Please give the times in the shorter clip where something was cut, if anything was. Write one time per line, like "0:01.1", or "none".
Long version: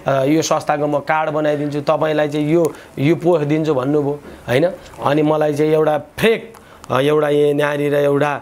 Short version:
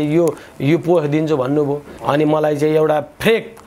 0:01.9